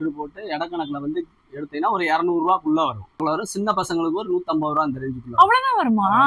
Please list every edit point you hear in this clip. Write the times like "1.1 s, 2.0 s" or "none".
3.3 s

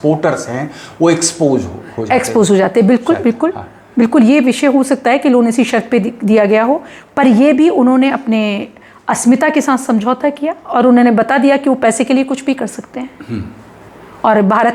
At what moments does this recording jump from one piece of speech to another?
none

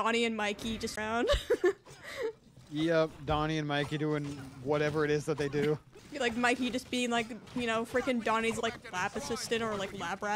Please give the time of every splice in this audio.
1.0 s, 6.0 s

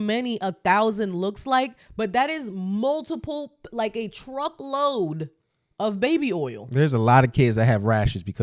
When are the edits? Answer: none

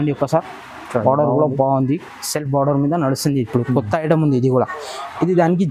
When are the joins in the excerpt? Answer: none

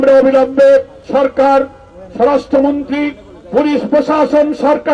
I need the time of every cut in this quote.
1.0 s

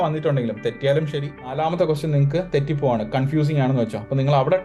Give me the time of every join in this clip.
1.4 s

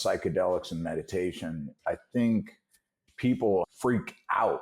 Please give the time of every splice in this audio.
1.7 s, 3.0 s, 3.7 s

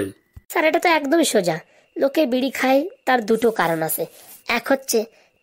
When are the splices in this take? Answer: none

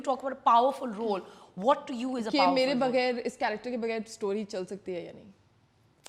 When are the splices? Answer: none

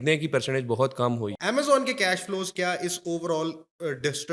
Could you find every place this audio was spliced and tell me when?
1.3 s

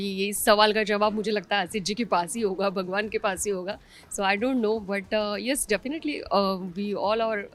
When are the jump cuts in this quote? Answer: none

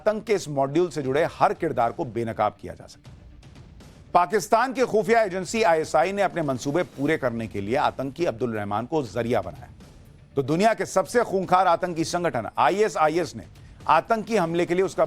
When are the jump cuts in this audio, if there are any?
1.9 s

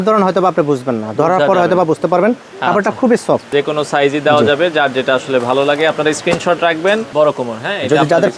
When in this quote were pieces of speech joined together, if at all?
3.5 s, 7.1 s

